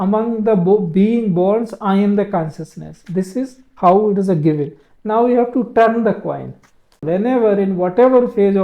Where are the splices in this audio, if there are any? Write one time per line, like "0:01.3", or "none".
0:07.0

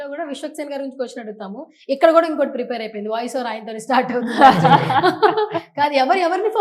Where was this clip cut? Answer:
none

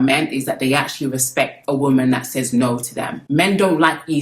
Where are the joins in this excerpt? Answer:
0:03.2

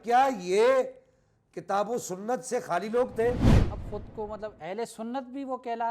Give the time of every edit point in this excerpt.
0:03.6

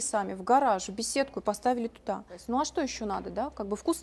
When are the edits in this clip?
0:02.4

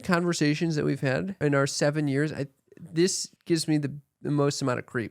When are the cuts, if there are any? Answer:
0:01.4
0:03.3

